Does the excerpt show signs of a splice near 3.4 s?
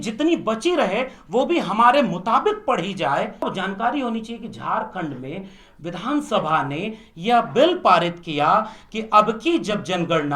yes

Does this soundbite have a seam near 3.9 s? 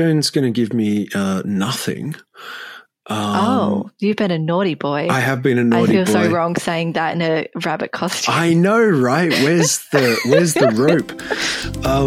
no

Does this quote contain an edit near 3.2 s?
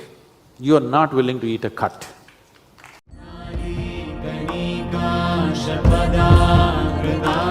yes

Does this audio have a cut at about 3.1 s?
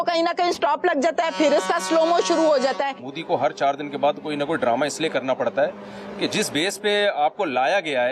yes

